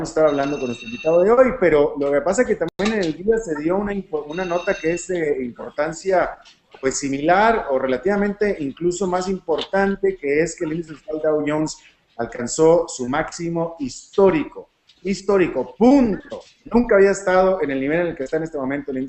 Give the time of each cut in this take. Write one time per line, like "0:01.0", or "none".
none